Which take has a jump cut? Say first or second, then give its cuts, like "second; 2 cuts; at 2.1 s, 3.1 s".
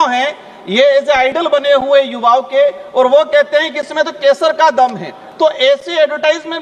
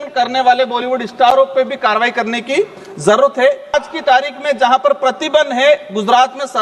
second; 1 cut; at 3.7 s